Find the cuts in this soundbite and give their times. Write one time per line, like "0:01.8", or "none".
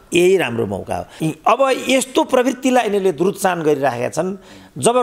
0:01.1